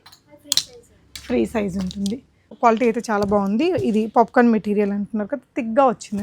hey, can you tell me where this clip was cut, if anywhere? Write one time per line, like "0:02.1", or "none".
0:02.5